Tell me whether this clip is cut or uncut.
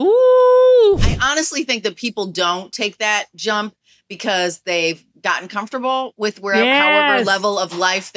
cut